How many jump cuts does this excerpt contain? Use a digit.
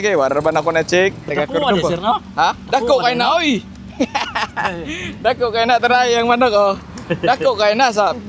1